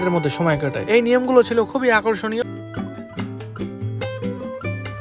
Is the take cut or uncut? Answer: cut